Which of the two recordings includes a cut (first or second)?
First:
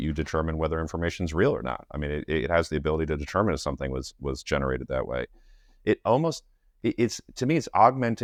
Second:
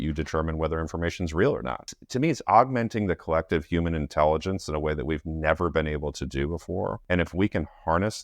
second